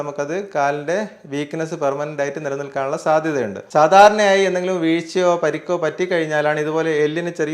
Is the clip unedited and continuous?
no; 1 cut; at 3.6 s

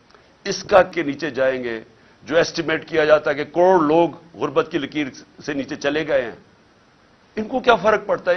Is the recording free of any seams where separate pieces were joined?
no; 1 cut; at 0.9 s

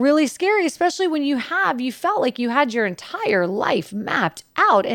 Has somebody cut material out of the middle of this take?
no; 0 cuts

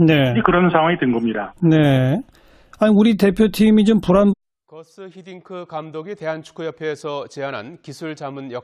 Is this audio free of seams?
yes; 0 cuts

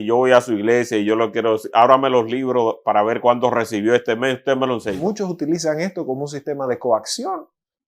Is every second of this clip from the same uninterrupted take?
no; 1 cut; at 5.0 s

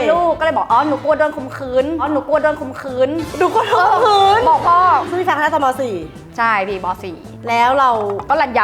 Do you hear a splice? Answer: yes; 1 cut; at 5.1 s

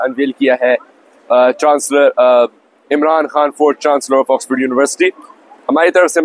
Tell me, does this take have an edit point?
no; 0 cuts

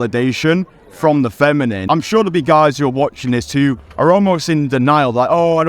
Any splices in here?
yes; 1 cut; at 1.8 s

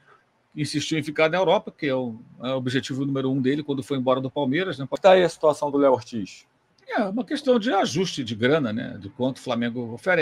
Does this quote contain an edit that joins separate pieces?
yes; 1 cut; at 5.0 s

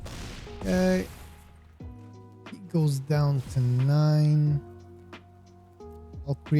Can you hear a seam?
yes; 2 cuts; at 1.2 s, 2.5 s

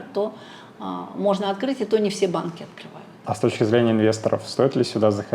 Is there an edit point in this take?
yes; 1 cut; at 3.2 s

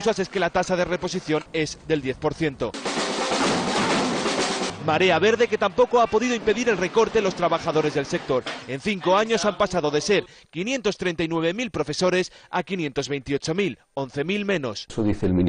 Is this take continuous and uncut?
no; 1 cut; at 13.5 s

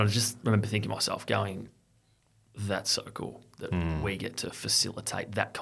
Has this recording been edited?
no; 0 cuts

